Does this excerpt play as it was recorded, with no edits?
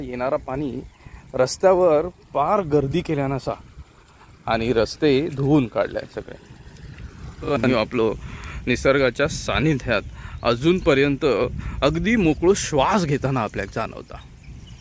no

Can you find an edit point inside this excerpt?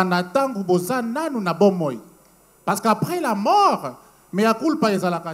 no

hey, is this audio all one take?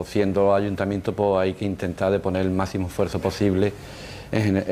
no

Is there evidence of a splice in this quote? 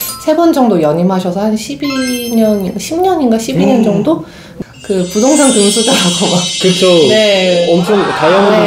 yes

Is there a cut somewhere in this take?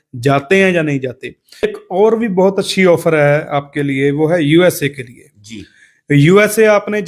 yes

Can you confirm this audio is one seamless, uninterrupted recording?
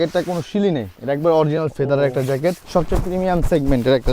no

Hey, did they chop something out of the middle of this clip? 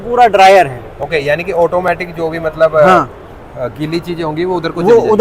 no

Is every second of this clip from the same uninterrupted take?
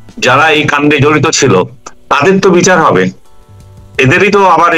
yes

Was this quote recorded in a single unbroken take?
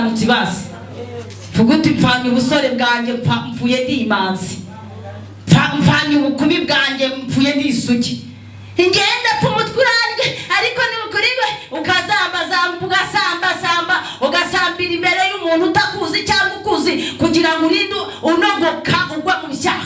yes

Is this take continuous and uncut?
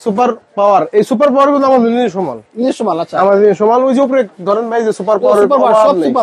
yes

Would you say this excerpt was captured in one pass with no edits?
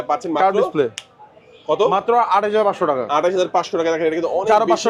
yes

